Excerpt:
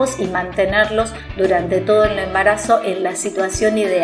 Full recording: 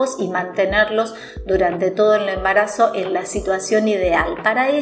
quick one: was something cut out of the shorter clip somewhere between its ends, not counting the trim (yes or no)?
yes